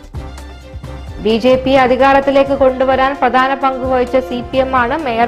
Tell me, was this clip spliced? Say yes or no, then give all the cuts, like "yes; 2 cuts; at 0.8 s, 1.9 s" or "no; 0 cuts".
no; 0 cuts